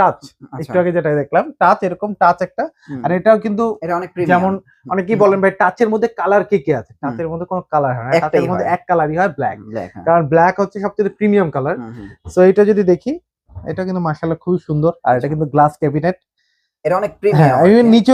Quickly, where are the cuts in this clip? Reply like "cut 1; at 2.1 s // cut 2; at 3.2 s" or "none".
none